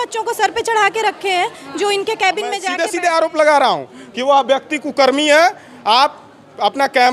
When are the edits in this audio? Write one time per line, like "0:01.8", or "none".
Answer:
0:02.7

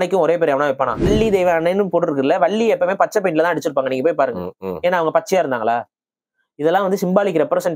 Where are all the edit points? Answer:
0:01.1

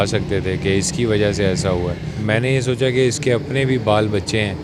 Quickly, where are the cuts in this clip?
0:02.2

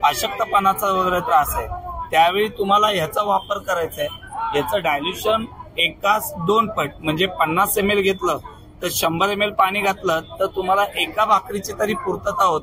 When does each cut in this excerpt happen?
none

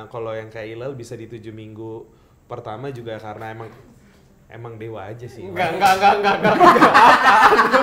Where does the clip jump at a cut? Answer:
none

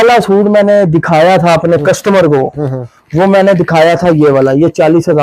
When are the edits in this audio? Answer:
none

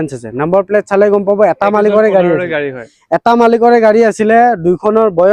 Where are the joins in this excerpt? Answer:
none

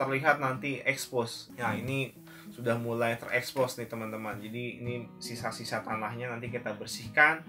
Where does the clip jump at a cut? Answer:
0:01.5

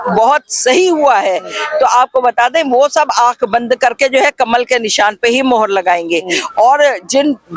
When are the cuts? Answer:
none

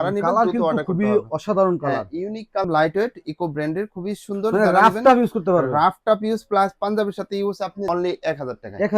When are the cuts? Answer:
0:02.6
0:07.9

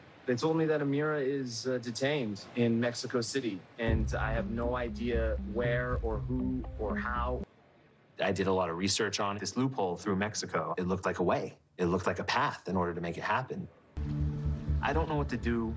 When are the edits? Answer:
0:07.6
0:14.1

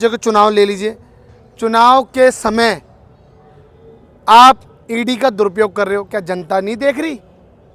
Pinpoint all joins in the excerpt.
none

